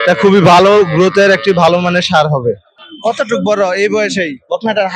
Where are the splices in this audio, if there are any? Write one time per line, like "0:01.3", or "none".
0:02.8